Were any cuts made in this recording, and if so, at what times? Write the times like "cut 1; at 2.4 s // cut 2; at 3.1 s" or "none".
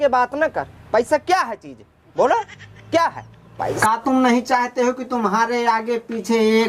cut 1; at 3.6 s